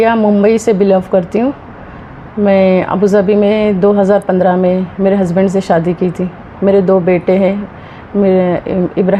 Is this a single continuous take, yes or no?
yes